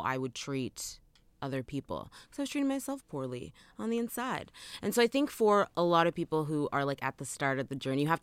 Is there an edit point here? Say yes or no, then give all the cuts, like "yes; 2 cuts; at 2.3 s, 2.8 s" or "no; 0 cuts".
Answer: no; 0 cuts